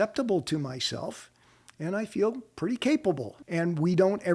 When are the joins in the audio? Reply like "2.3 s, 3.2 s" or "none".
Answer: 3.3 s